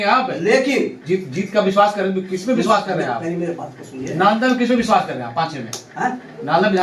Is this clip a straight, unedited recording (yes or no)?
yes